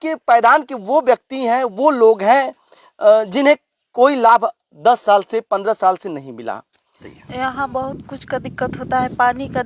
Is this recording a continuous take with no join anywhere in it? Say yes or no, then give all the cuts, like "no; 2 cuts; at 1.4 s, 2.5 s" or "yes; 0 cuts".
no; 1 cut; at 7.1 s